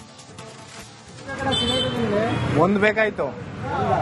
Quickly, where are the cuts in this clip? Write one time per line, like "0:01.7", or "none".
0:00.9